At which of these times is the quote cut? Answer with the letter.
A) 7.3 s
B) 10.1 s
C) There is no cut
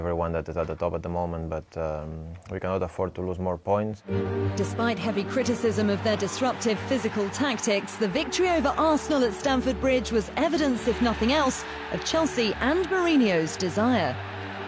B